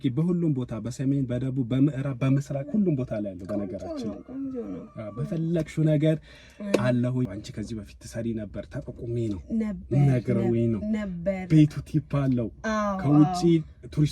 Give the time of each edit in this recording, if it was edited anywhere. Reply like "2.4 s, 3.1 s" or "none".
7.3 s

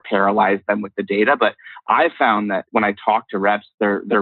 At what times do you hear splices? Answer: 2.7 s

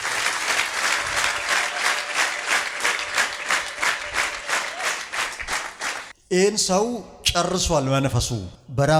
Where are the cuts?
none

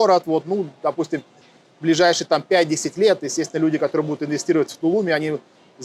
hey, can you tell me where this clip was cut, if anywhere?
none

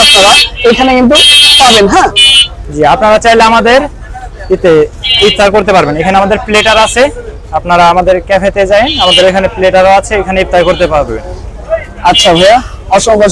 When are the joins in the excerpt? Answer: none

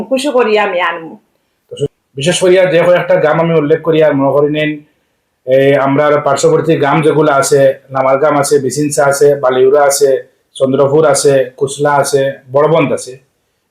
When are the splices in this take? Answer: 1.8 s

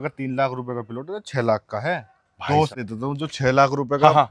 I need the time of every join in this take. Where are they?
2.7 s

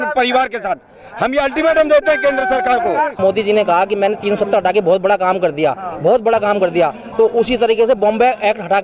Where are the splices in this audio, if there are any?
3.2 s

